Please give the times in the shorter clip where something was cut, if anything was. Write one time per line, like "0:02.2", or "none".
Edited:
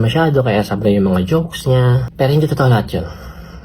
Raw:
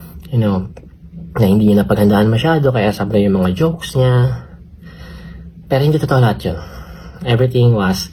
0:02.1